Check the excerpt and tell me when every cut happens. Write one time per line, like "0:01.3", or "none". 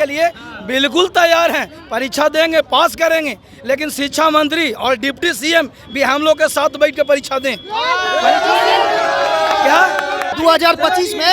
0:10.3